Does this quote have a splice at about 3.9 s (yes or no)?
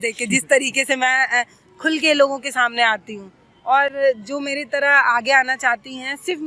no